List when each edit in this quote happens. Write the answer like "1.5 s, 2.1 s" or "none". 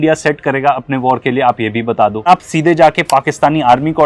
2.3 s